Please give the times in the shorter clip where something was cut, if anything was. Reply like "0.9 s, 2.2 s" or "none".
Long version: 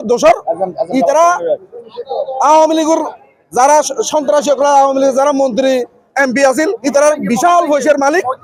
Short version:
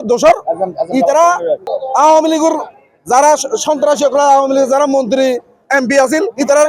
1.7 s